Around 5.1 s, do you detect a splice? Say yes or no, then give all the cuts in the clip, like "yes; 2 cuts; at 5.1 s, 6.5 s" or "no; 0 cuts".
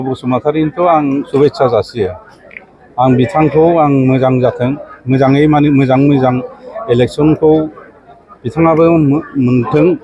no; 0 cuts